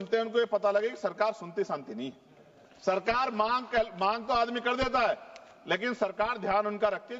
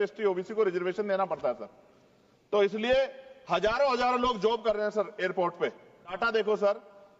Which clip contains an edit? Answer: second; 1 cut; at 6.2 s

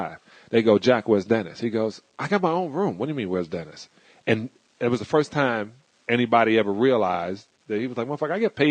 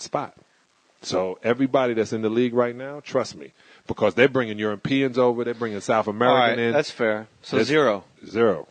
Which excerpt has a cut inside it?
second; 1 cut; at 2.8 s

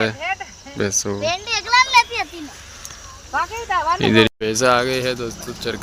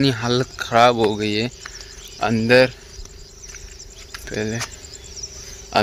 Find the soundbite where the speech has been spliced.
first; 1 cut; at 4.3 s

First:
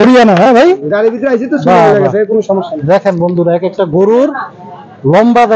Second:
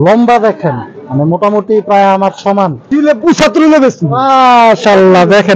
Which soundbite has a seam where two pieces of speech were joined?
second; 1 cut; at 2.9 s

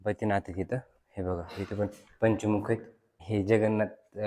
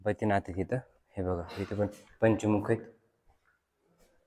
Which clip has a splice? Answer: first; 1 cut; at 3.1 s

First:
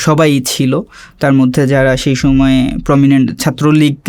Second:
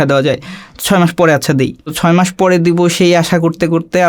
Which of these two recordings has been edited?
second; 1 cut; at 2.0 s

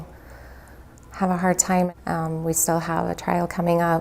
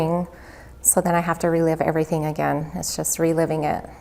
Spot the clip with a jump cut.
first; 1 cut; at 1.9 s

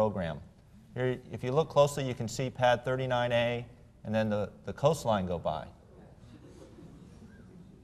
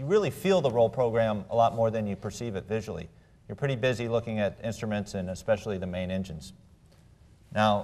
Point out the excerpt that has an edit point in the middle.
second; 1 cut; at 4.6 s

